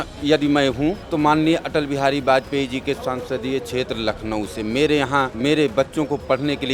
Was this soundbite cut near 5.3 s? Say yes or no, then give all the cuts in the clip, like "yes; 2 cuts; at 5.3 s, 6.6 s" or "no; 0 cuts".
yes; 2 cuts; at 1.0 s, 5.3 s